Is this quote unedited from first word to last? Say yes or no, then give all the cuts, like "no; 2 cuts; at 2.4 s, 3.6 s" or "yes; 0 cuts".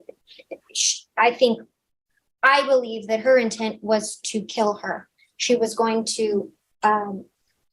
yes; 0 cuts